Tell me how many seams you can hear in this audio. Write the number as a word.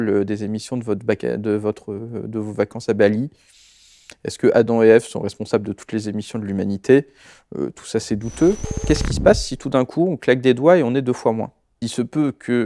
two